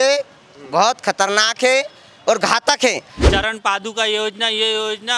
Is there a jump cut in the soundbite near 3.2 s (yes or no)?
yes